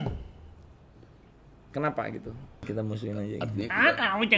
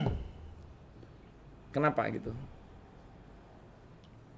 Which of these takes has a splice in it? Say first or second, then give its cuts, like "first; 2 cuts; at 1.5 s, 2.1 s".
first; 1 cut; at 2.7 s